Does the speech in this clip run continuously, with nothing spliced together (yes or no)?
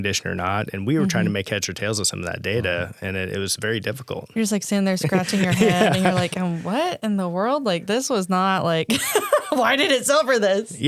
yes